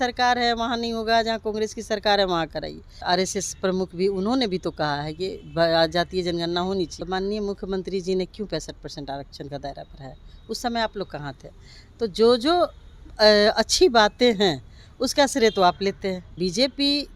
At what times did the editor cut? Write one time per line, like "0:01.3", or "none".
0:02.9
0:07.0
0:16.3